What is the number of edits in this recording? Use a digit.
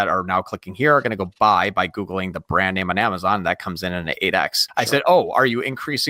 1